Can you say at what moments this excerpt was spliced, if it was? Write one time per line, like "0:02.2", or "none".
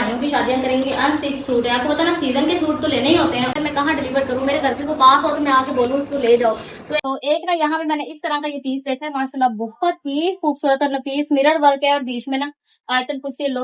0:03.5
0:07.0